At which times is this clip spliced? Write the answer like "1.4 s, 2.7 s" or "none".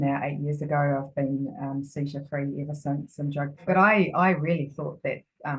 3.6 s